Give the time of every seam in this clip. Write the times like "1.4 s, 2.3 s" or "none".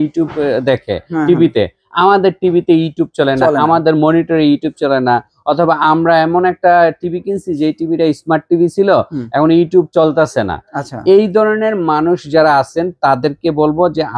none